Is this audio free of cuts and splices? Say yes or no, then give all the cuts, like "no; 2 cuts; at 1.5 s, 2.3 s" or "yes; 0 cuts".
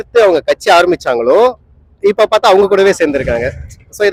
yes; 0 cuts